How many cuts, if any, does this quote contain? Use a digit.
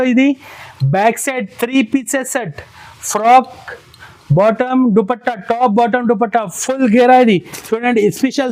0